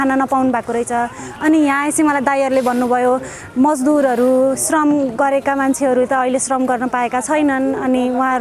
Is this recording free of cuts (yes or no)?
yes